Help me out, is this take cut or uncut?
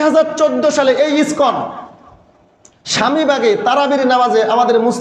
uncut